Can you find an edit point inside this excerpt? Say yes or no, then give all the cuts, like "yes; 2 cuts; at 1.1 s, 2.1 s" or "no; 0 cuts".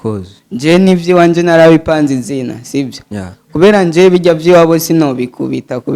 no; 0 cuts